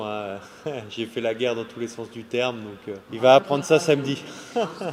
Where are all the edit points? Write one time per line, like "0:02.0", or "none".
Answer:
0:03.1